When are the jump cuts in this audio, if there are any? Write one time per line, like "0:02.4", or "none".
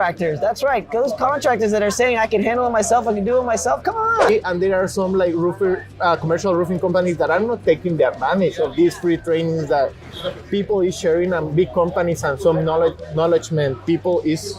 0:04.3